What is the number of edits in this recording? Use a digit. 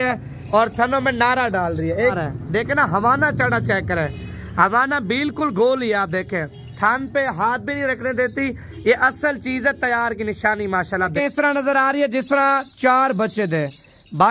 2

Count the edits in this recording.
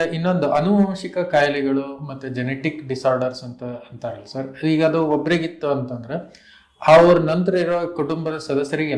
0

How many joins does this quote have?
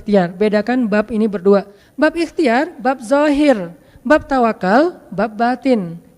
1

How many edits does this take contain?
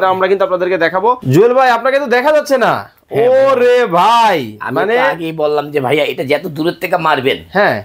1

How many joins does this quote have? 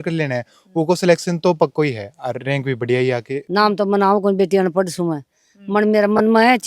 1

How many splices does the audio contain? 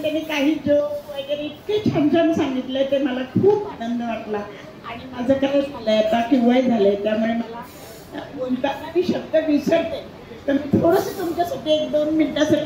0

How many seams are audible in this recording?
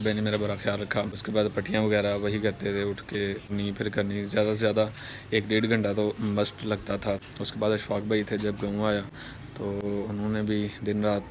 3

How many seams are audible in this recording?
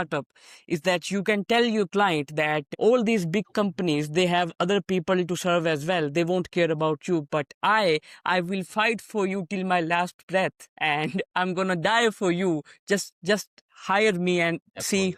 0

